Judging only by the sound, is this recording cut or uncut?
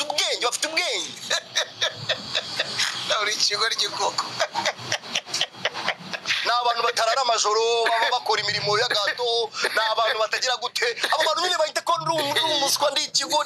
uncut